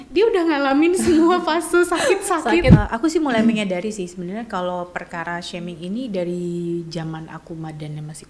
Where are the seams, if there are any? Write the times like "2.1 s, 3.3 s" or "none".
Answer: 2.7 s